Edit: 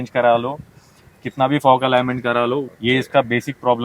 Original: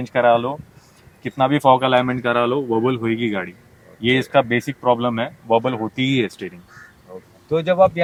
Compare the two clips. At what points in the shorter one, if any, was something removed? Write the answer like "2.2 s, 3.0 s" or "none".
2.7 s